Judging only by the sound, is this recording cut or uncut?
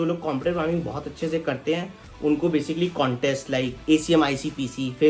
cut